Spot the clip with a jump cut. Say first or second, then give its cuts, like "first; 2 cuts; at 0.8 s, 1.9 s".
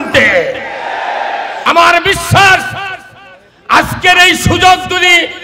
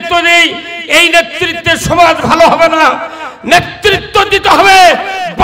first; 1 cut; at 1.6 s